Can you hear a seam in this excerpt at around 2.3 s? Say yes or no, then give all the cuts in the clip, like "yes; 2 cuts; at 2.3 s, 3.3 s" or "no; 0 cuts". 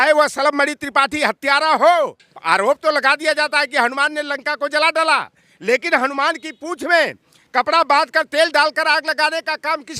yes; 1 cut; at 2.3 s